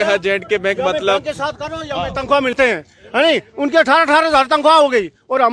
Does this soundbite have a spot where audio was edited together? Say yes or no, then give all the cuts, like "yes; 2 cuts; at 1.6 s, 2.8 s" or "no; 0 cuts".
yes; 1 cut; at 2.5 s